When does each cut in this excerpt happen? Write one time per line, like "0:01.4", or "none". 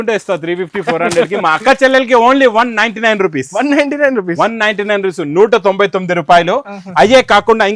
none

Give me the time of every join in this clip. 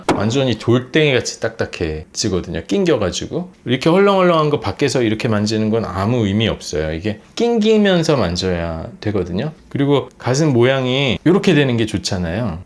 0:09.6

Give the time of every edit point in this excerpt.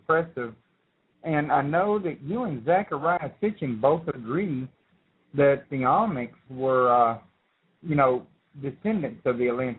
0:06.4

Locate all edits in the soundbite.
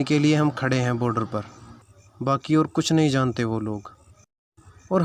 none

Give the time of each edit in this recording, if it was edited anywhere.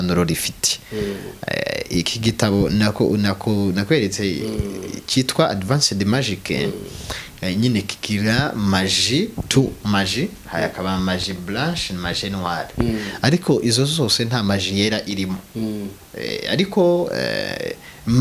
none

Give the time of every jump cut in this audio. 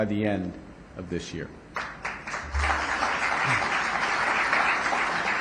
none

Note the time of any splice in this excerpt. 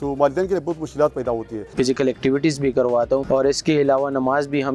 0:01.7

